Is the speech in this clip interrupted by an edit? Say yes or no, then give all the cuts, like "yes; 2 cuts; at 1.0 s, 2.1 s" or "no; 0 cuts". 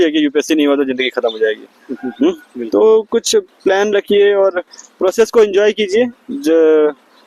no; 0 cuts